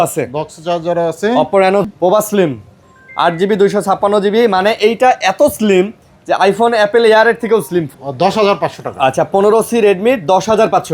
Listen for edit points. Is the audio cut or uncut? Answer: cut